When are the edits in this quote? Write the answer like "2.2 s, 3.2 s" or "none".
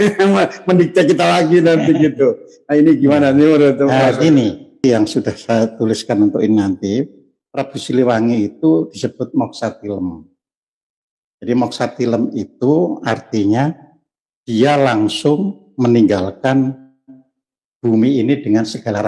4.8 s